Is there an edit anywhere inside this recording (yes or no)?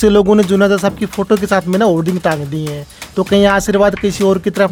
no